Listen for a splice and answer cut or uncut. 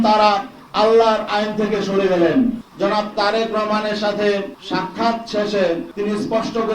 cut